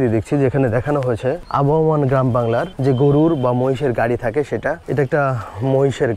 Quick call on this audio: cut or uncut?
cut